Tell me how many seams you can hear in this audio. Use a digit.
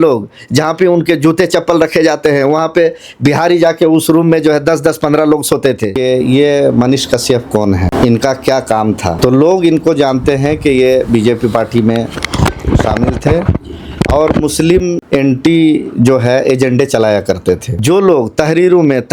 5